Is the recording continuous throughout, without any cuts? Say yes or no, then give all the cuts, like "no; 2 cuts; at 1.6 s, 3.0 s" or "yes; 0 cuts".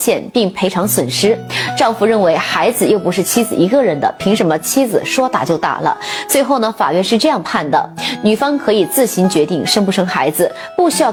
yes; 0 cuts